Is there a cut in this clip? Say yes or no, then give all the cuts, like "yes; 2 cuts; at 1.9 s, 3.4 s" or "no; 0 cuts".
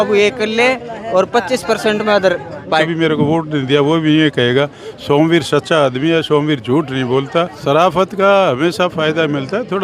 yes; 2 cuts; at 2.9 s, 7.5 s